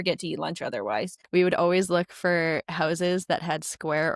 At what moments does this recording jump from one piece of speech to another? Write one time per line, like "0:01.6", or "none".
0:01.2